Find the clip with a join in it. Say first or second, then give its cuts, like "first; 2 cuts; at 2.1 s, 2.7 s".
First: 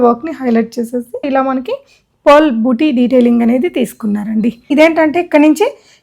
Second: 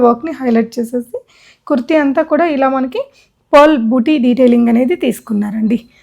first; 2 cuts; at 1.2 s, 4.7 s